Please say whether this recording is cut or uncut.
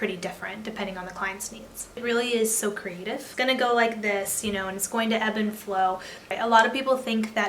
cut